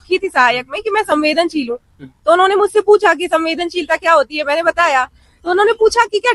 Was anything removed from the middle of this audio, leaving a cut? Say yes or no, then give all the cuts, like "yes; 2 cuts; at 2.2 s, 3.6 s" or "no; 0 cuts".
no; 0 cuts